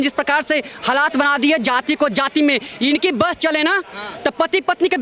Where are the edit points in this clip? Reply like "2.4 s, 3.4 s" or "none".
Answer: none